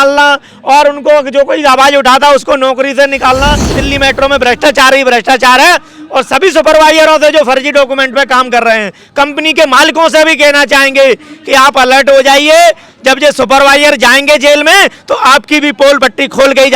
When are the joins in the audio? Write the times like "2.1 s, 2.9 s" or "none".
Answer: 3.8 s

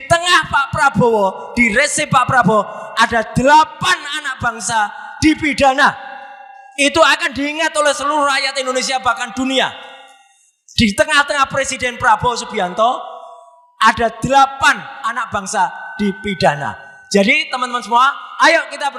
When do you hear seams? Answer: none

